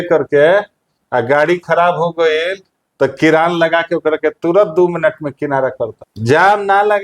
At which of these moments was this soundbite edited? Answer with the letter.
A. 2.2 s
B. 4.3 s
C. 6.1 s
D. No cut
C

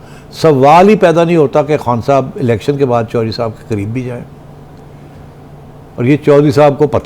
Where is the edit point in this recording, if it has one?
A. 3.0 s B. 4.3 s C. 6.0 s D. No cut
D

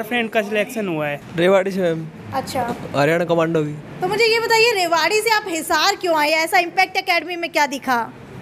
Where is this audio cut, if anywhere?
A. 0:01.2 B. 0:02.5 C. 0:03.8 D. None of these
A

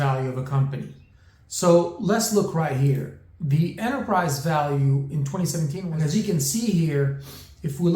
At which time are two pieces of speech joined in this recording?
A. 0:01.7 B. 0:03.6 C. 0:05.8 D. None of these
C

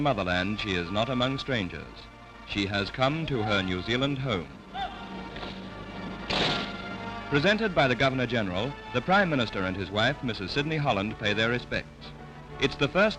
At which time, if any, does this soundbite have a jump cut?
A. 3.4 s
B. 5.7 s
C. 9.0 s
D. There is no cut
D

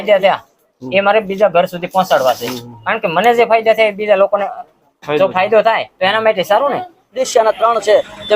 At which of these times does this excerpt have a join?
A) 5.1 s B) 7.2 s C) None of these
B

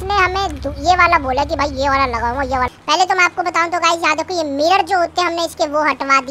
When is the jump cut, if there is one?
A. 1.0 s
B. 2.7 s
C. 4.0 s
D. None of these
B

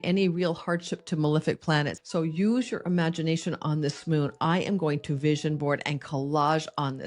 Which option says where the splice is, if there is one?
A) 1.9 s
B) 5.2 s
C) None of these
A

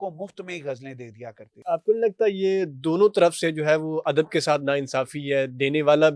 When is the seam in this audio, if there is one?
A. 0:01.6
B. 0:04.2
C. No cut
A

